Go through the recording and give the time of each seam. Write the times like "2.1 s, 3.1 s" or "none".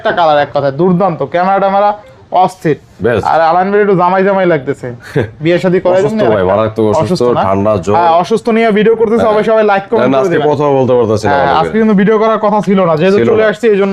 none

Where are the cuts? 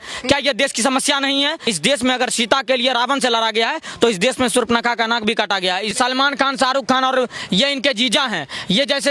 1.7 s, 5.9 s

